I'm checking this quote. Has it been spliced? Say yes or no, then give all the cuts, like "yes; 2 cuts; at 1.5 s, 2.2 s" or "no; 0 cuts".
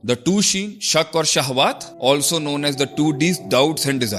yes; 1 cut; at 1.9 s